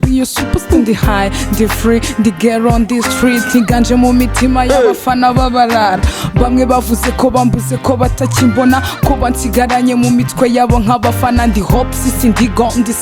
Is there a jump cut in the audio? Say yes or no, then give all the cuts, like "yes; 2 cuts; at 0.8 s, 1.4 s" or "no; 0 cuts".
no; 0 cuts